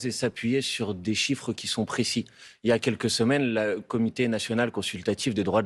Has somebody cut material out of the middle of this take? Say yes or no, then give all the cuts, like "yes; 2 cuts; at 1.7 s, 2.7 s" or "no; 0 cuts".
no; 0 cuts